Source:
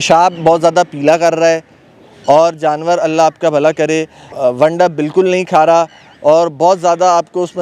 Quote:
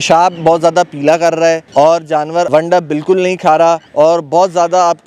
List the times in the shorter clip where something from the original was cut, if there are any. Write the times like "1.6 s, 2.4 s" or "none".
1.6 s, 2.5 s, 3.9 s